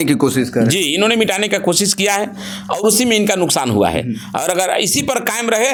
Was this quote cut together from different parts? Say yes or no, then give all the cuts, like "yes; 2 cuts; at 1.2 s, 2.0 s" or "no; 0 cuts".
no; 0 cuts